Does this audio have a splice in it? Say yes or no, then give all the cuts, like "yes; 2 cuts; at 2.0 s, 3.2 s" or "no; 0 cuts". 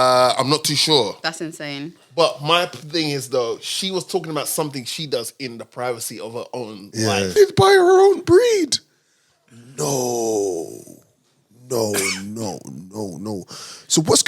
yes; 1 cut; at 7.3 s